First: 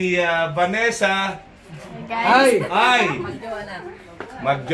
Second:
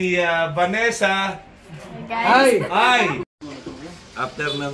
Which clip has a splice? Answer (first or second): second